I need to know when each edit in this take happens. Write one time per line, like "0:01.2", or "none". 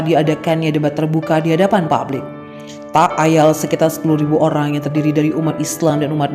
none